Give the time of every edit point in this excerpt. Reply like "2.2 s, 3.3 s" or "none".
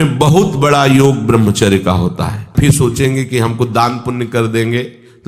2.5 s